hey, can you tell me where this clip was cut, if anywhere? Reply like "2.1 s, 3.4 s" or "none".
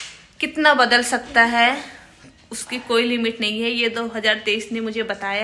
none